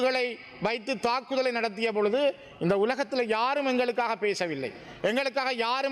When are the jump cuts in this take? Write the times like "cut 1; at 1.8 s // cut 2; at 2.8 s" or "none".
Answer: none